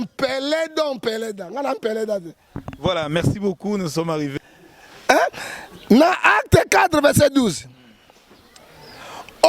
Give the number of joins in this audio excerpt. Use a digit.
1